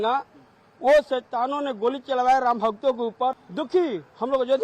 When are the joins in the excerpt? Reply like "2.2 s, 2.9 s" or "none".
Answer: none

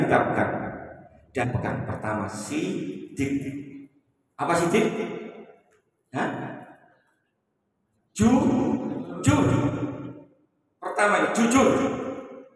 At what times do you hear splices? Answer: 1.4 s

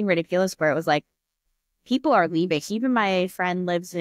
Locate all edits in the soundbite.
2.6 s

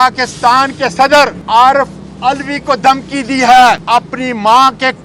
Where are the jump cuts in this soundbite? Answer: 1.4 s, 3.8 s

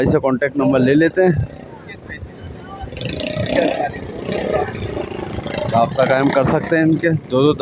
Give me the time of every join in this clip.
none

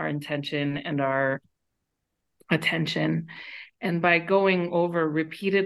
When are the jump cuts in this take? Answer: none

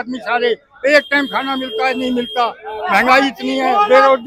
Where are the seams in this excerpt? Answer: none

